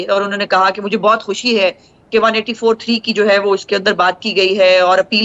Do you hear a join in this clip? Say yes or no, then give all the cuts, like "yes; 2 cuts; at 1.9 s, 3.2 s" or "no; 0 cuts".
no; 0 cuts